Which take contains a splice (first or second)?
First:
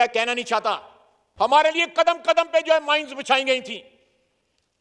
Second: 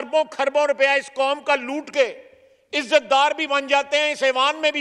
first